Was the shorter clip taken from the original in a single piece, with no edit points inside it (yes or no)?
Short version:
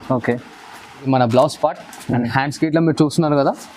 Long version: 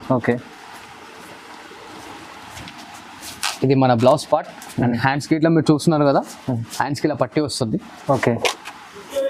no